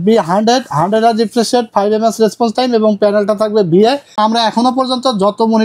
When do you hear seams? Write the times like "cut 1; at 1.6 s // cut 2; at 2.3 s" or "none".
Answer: cut 1; at 4.2 s